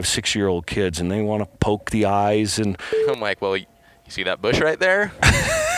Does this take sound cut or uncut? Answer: cut